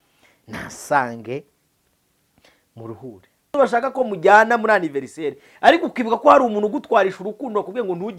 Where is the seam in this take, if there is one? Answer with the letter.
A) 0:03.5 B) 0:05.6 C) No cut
A